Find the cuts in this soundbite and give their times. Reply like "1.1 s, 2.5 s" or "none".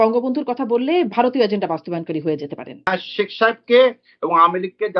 2.9 s

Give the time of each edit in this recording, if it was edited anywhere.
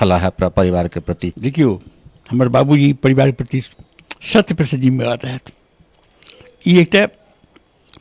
1.3 s

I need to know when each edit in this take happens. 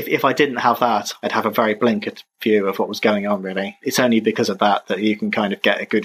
3.8 s

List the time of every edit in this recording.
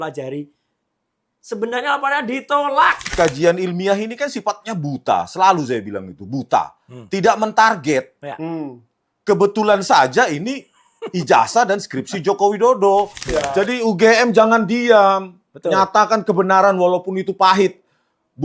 3.1 s, 13.2 s

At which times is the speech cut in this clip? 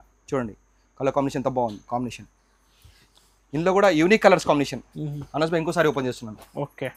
none

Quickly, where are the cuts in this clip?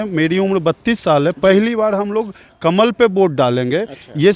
none

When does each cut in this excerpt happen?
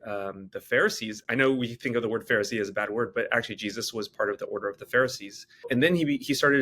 5.7 s

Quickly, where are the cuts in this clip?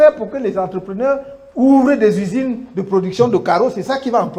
none

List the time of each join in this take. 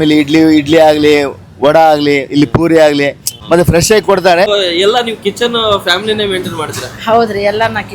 3.3 s, 4.5 s

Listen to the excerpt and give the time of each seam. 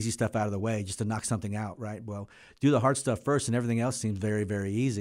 none

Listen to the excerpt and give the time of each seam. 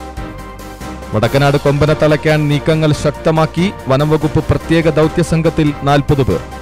none

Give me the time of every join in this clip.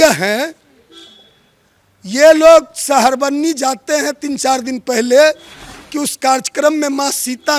none

